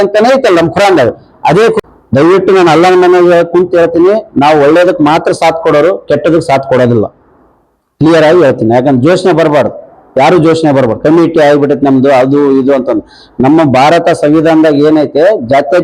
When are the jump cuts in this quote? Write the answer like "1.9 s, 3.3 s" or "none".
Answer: 1.8 s